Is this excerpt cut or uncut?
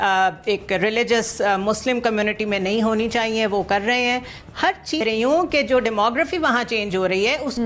cut